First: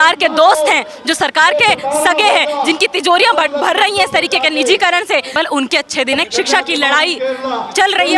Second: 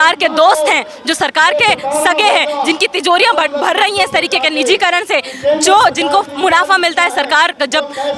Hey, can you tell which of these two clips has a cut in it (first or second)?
first